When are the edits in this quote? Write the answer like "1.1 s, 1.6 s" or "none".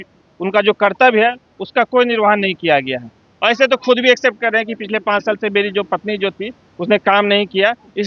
none